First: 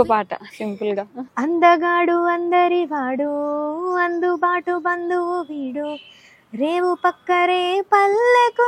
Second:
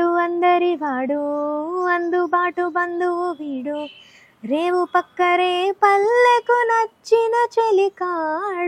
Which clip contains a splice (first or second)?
first